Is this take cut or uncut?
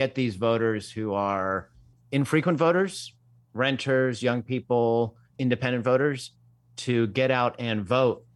uncut